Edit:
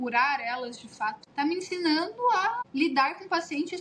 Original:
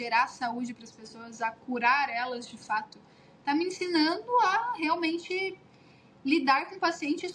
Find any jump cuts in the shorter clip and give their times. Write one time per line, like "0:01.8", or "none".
0:01.2
0:02.6